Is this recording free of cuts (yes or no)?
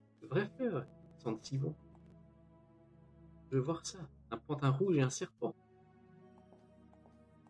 no